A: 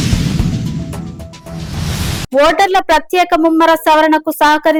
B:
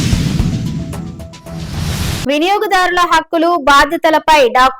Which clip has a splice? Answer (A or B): B